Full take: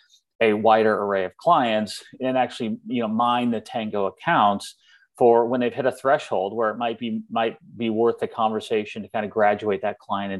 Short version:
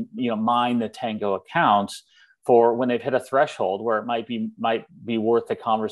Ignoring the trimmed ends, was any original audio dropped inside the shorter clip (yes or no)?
no